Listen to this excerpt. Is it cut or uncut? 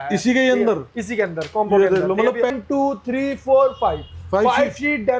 cut